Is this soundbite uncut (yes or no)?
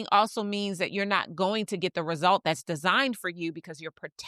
yes